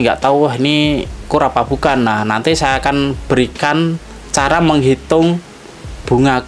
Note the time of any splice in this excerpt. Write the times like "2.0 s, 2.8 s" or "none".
none